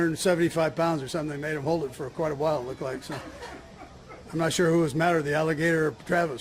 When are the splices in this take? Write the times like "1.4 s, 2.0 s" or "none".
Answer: none

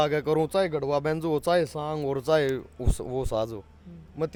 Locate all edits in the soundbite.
none

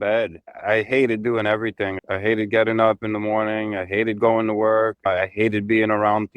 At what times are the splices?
2.0 s

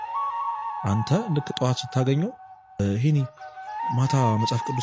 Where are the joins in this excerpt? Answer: none

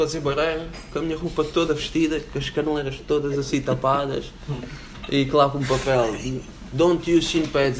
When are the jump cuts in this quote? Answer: none

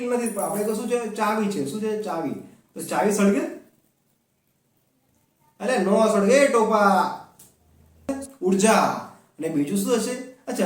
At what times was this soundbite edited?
8.1 s

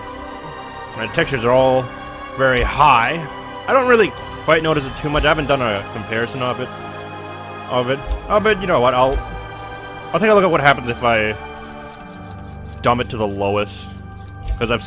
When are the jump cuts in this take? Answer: none

